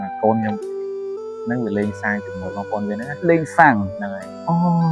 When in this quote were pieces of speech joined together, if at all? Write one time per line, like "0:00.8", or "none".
none